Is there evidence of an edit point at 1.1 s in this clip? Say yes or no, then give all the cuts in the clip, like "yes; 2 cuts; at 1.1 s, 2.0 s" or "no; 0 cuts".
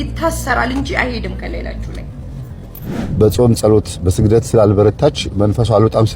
no; 1 cut; at 3.0 s